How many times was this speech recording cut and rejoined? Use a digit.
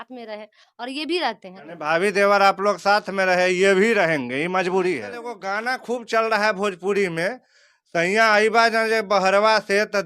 2